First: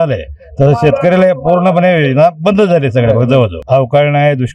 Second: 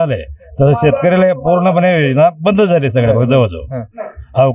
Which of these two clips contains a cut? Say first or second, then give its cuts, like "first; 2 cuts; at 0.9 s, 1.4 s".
first; 1 cut; at 3.6 s